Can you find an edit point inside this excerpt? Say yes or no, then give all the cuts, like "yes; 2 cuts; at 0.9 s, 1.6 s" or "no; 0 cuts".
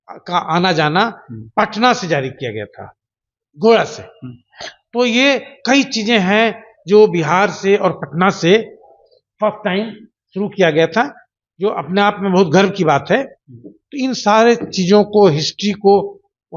no; 0 cuts